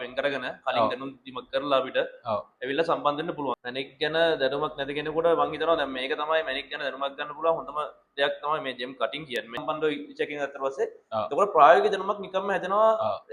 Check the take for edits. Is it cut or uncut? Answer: cut